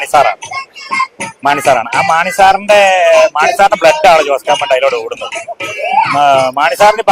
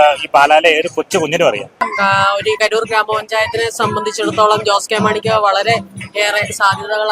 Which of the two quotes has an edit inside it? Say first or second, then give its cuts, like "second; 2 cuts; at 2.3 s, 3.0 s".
second; 1 cut; at 1.9 s